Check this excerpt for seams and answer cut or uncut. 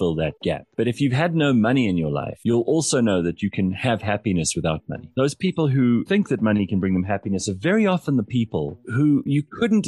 cut